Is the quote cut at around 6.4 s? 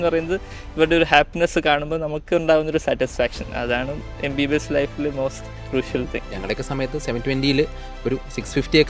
yes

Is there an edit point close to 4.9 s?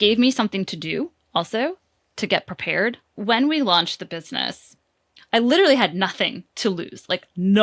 no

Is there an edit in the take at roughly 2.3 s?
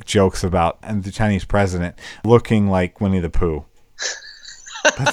yes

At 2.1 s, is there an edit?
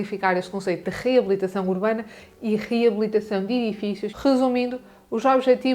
no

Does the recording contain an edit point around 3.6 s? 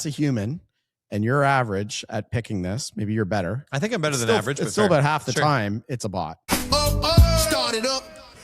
no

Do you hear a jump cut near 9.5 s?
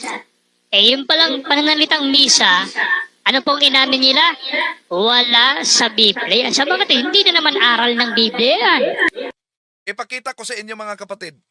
yes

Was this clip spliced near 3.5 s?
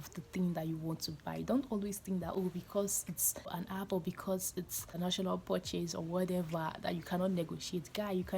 yes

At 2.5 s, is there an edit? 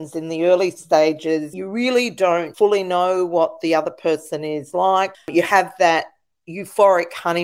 yes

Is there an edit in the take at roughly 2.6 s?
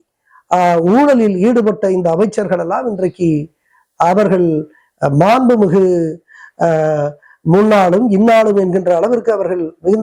no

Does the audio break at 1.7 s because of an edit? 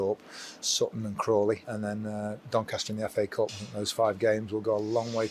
yes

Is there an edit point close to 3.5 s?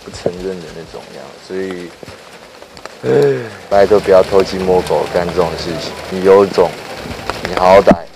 yes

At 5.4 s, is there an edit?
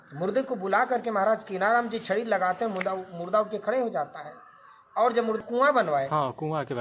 yes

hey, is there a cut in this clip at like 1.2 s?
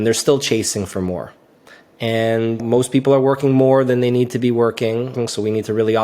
no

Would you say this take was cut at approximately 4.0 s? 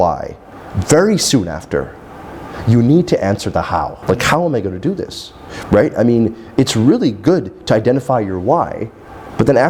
yes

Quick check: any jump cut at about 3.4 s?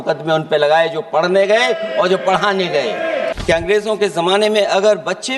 yes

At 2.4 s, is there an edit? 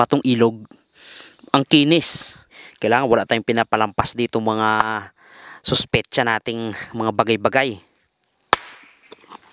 yes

